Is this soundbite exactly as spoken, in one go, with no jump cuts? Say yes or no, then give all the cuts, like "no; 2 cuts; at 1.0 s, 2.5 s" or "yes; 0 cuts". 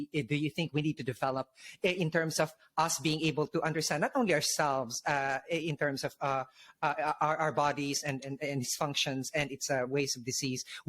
yes; 0 cuts